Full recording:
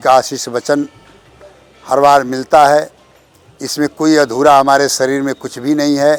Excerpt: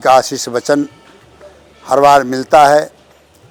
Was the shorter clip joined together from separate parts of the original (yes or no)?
no